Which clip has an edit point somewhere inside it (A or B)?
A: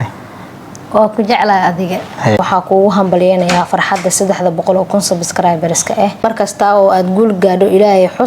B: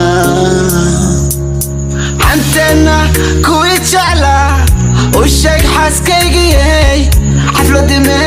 A